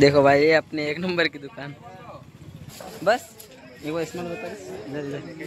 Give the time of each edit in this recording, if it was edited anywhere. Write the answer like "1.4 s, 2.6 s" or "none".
2.6 s